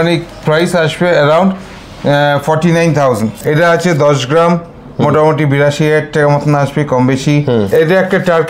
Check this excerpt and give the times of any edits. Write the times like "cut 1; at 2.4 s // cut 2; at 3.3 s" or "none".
cut 1; at 3.3 s // cut 2; at 7.7 s

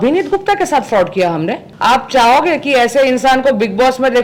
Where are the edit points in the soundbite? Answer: cut 1; at 1.7 s

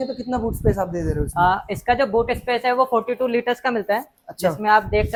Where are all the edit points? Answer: none

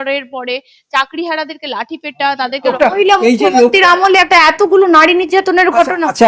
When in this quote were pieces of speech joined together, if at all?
cut 1; at 2.7 s

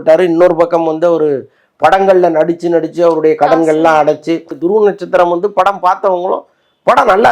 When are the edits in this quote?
cut 1; at 4.5 s

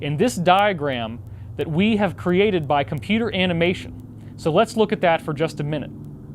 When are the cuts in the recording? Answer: cut 1; at 1.9 s

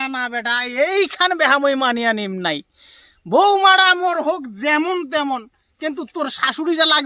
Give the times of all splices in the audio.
none

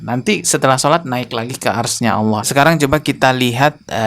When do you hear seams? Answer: cut 1; at 2.5 s

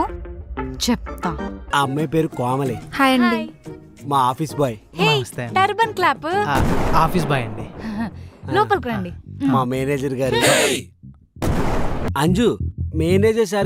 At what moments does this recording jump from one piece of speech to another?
cut 1; at 1.6 s // cut 2; at 12.1 s

